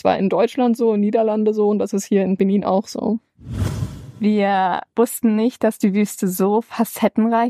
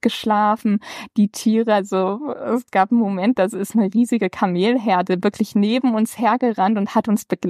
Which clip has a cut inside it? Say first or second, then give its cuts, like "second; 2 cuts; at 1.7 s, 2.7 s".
first; 3 cuts; at 2.4 s, 3.6 s, 4.8 s